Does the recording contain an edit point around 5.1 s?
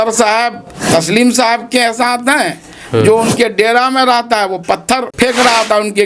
yes; 1 cut; at 5.1 s

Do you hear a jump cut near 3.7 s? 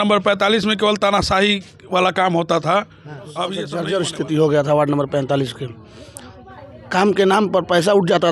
yes; 1 cut; at 3.7 s

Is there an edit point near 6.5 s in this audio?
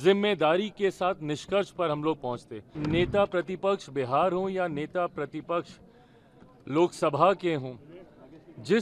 no; 1 cut; at 2.7 s

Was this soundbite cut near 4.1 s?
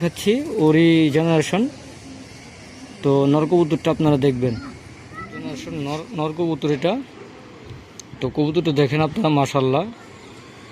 no; 1 cut; at 5.7 s

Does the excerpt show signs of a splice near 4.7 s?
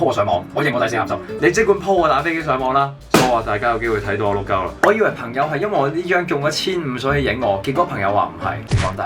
yes; 2 cuts; at 1.3 s, 4.7 s

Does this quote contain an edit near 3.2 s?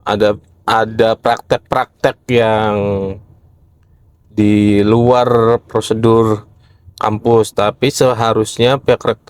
no; 0 cuts

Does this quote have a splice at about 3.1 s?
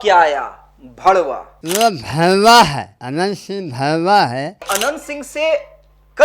no; 2 cuts; at 1.5 s, 4.6 s

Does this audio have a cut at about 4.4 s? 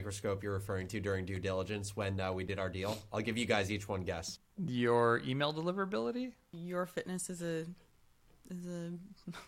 yes; 2 cuts; at 4.4 s, 6.5 s

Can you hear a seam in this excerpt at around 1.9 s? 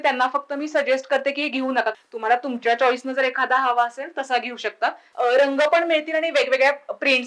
yes; 2 cuts; at 1.9 s, 5.0 s

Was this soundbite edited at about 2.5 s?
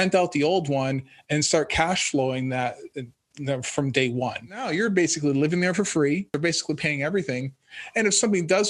no; 2 cuts; at 4.7 s, 6.3 s

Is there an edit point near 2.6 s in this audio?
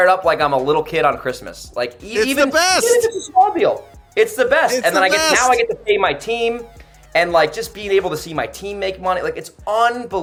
no; 0 cuts

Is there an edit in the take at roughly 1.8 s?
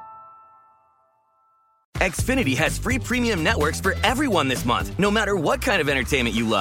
yes; 1 cut; at 1.8 s

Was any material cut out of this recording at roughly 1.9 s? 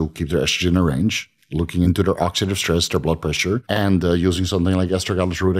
yes; 2 cuts; at 1.9 s, 3.6 s

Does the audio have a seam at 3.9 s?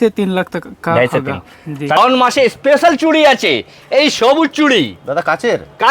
no; 1 cut; at 2.0 s

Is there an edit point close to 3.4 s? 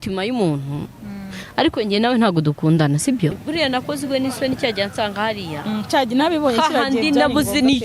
yes; 1 cut; at 3.4 s

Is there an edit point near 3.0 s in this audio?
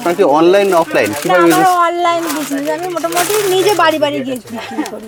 no; 0 cuts

